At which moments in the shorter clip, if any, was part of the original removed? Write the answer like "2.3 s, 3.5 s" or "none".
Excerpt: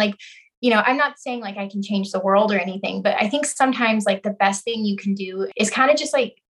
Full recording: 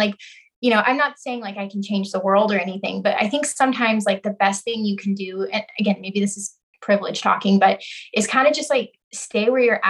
5.5 s